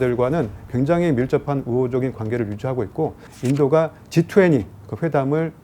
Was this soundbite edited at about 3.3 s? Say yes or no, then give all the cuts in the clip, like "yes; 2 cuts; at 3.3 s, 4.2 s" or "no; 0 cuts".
yes; 1 cut; at 3.3 s